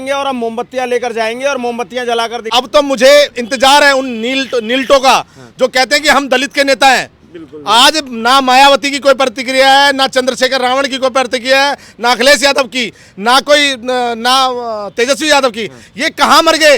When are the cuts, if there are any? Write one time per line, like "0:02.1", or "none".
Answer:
0:02.5